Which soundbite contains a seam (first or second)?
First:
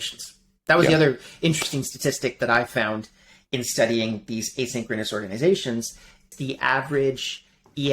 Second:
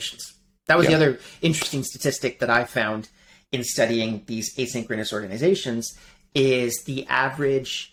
first